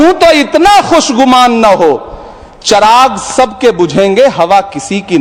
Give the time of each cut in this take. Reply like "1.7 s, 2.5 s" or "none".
none